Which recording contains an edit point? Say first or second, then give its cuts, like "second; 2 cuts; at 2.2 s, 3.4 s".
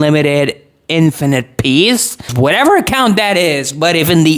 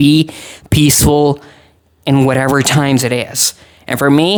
first; 1 cut; at 2.2 s